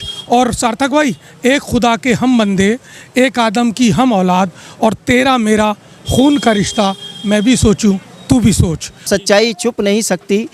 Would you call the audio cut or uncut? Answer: cut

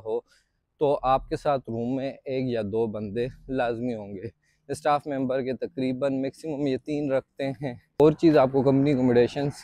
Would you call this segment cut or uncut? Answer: cut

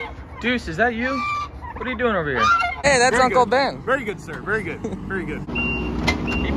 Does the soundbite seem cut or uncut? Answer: cut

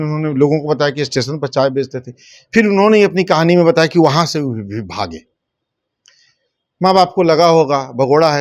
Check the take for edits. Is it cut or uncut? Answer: uncut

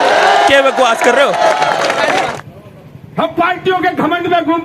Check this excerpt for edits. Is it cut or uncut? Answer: cut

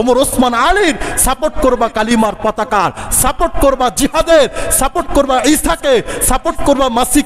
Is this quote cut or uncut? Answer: uncut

